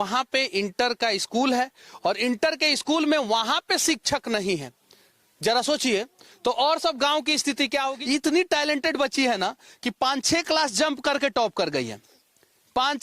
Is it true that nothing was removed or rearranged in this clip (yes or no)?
no